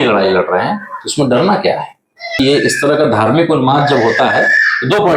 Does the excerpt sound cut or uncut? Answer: cut